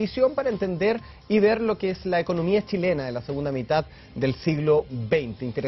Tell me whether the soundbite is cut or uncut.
cut